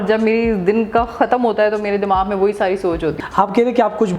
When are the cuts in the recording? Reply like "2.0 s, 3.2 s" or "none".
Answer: 3.2 s